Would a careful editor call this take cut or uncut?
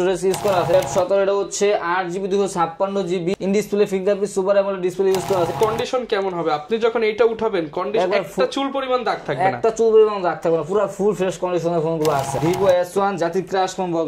cut